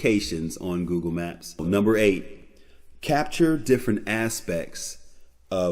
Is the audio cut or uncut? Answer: cut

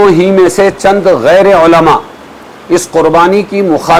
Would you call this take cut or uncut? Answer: uncut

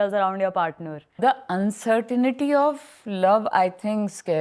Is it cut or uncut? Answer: cut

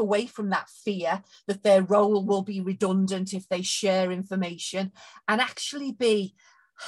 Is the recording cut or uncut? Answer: uncut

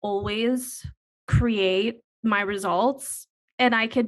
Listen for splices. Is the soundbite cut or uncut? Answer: cut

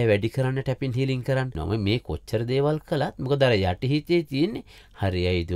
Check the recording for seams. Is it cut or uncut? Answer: cut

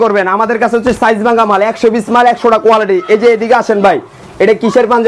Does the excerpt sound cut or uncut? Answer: uncut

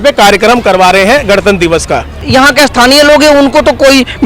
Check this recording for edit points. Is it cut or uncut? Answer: cut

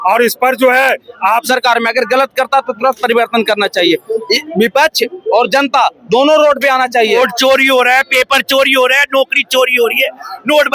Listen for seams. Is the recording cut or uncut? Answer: cut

